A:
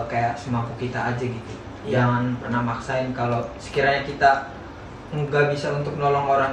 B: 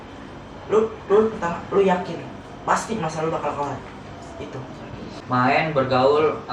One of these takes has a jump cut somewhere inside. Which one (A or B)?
B